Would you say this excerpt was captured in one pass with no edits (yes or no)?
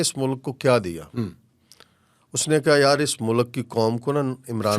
yes